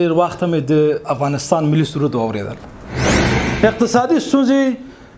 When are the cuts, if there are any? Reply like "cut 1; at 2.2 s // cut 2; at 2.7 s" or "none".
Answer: cut 1; at 3.3 s